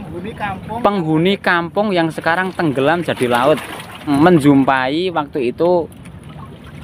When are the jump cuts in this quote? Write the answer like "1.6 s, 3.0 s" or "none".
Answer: 4.1 s